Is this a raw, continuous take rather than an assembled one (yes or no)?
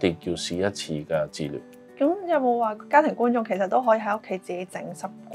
yes